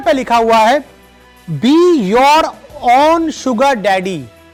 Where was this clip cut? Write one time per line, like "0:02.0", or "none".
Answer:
none

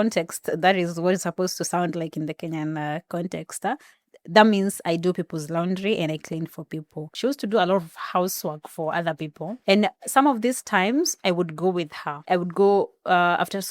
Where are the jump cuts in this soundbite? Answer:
0:07.0
0:09.5
0:12.1

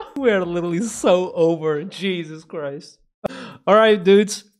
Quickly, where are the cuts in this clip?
0:03.3

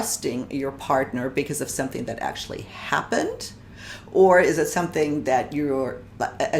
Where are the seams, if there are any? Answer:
none

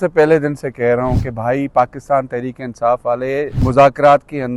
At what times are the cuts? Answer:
0:03.5

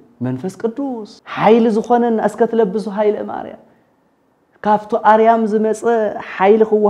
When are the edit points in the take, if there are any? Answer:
0:01.2

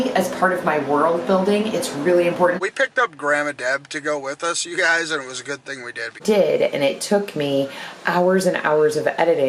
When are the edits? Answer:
0:02.6
0:06.2

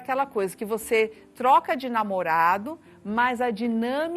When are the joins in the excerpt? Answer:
none

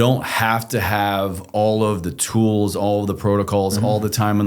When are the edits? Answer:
0:01.4

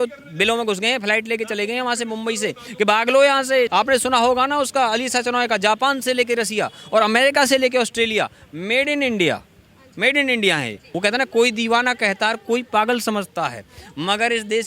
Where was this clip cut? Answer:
0:03.7
0:10.8

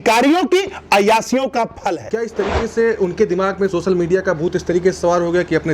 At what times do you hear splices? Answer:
0:02.0

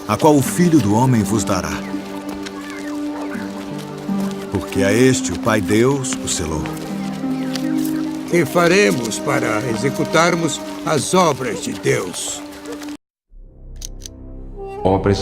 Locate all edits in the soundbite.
none

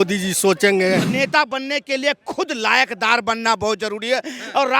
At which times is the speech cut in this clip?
0:01.1

